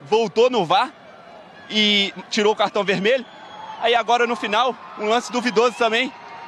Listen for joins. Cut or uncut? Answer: uncut